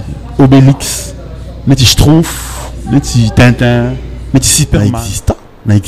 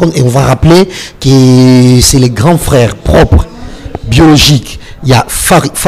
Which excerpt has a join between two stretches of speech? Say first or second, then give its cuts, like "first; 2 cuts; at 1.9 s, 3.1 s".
first; 1 cut; at 4.8 s